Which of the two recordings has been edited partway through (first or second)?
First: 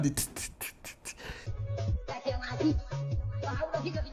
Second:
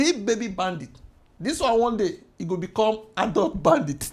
first